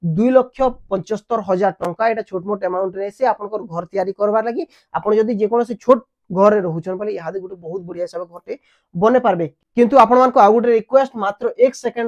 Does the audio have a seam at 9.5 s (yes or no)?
yes